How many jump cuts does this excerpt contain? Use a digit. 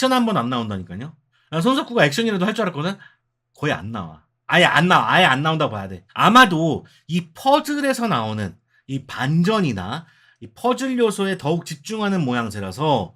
0